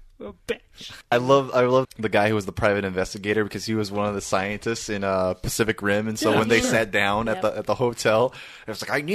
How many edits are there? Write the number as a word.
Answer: two